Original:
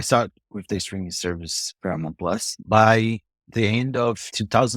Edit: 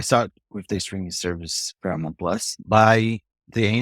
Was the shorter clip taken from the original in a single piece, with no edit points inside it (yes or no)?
yes